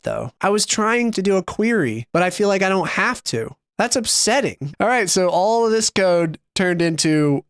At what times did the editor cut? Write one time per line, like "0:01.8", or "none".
0:04.6